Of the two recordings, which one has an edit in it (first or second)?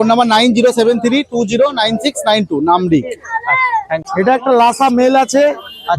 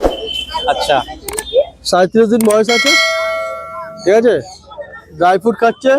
first